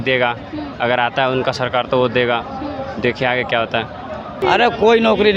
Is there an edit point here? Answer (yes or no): yes